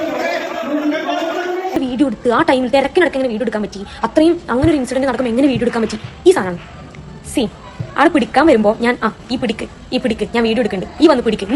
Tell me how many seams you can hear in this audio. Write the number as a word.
one